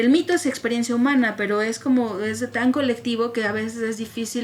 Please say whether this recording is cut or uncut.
uncut